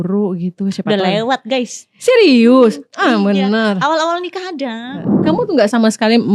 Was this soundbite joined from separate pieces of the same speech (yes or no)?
yes